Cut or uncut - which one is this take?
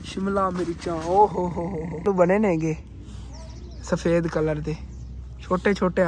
cut